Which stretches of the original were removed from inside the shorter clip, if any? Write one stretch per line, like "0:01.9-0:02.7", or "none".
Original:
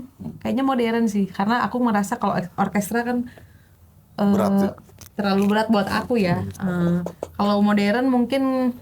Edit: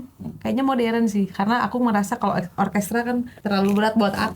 0:03.3-0:05.1